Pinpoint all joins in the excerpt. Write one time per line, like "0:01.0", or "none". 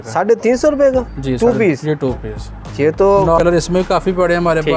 0:03.4